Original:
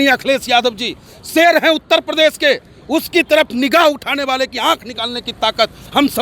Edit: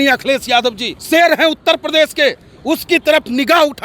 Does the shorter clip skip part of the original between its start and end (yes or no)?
yes